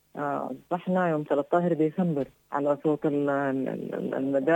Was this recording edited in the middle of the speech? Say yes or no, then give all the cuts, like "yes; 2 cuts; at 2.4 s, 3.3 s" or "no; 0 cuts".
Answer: yes; 1 cut; at 2.4 s